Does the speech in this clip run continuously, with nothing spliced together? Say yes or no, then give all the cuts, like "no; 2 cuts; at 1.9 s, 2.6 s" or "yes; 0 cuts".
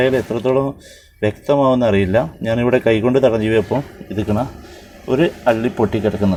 yes; 0 cuts